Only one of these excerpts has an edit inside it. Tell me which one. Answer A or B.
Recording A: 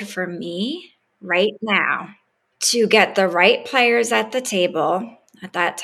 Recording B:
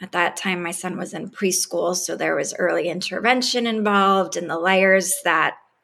A